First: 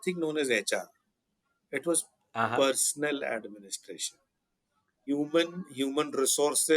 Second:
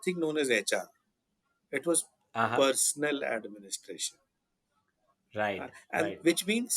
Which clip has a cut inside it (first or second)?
first